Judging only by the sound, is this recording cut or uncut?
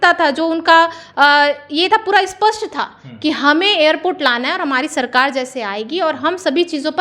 uncut